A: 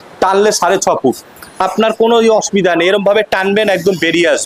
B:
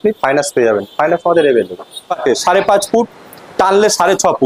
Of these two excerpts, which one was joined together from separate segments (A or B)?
B